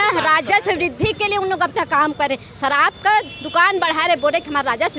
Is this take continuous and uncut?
yes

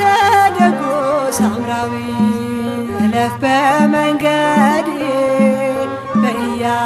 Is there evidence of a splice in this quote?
no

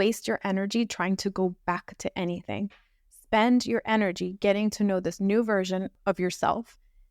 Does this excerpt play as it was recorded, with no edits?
no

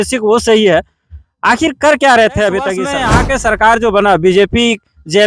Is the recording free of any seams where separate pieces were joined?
no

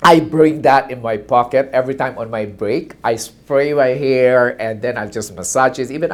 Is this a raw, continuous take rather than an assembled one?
yes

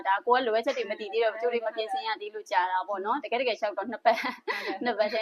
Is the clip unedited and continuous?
yes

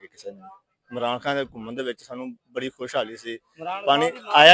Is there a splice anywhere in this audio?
no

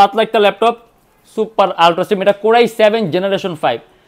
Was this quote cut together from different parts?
no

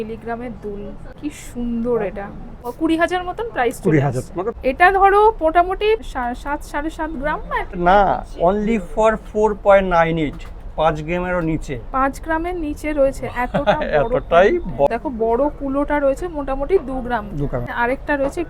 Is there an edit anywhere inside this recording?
yes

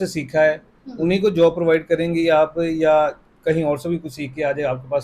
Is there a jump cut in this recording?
no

